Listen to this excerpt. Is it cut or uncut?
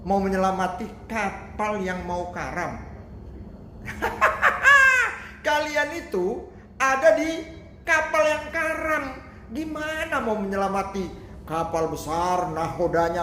uncut